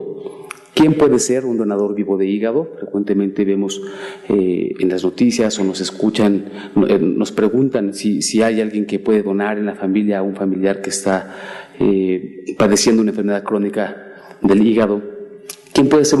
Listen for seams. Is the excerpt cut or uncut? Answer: cut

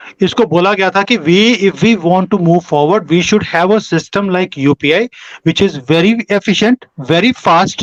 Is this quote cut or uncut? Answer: uncut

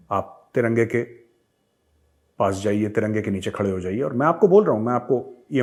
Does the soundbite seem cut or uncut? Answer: uncut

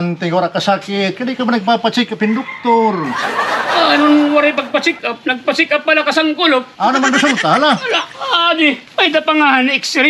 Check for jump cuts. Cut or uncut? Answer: cut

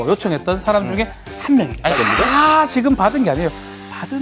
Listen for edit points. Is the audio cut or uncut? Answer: cut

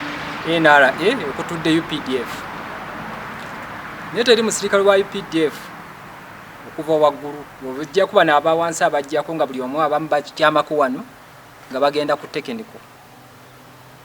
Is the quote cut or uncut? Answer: uncut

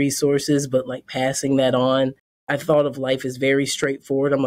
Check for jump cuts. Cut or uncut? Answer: cut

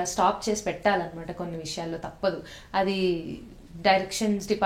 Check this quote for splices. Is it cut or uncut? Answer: uncut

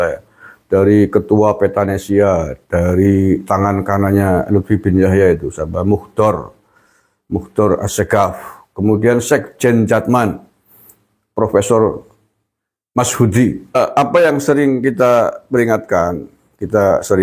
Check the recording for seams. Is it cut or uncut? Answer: cut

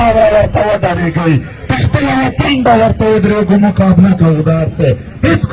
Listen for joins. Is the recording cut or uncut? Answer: uncut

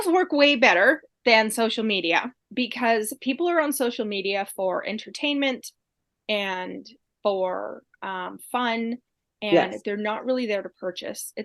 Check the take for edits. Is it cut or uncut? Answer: cut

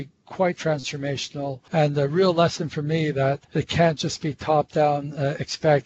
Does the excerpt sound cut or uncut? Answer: cut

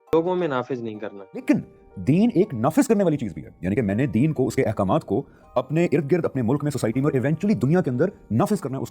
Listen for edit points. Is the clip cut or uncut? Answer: cut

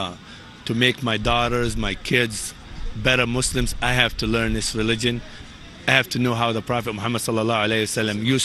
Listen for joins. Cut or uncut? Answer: cut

